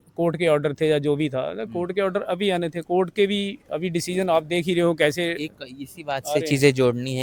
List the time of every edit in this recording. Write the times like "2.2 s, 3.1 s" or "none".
none